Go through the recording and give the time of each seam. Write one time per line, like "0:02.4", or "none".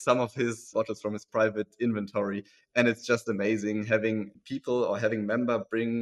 none